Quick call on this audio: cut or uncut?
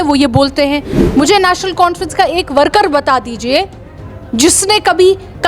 cut